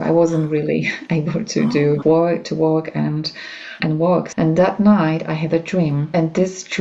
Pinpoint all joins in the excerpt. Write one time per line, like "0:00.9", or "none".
0:02.0
0:03.8
0:06.1